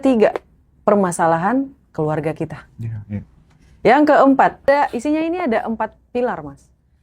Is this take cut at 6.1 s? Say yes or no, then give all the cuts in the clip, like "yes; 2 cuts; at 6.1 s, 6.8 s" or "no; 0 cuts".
no; 1 cut; at 4.6 s